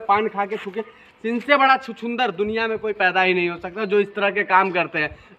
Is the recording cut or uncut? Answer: uncut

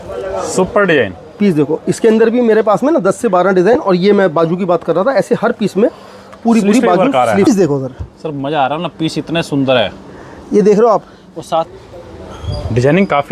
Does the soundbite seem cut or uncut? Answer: cut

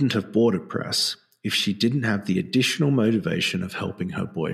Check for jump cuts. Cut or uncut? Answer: uncut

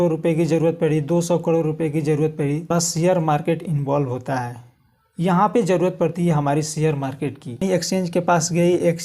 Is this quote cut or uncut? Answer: cut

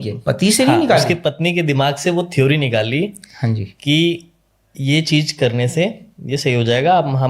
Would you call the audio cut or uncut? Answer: uncut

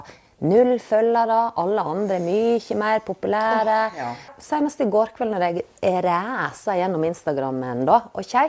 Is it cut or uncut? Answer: cut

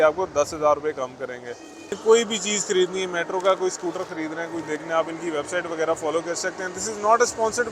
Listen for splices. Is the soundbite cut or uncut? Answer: cut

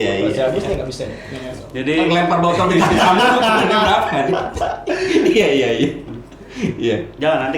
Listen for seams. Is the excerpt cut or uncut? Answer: uncut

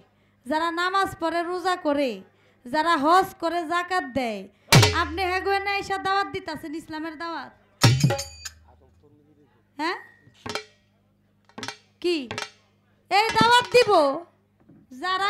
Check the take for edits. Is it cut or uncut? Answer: uncut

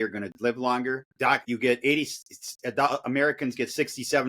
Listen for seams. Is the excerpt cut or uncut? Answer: cut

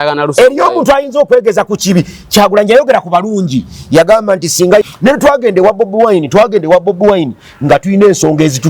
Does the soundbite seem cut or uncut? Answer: cut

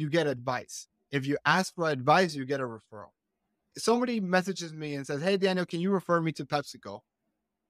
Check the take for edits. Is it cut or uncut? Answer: cut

